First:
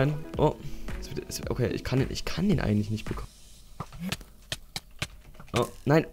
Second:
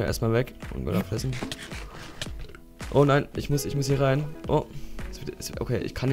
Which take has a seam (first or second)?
first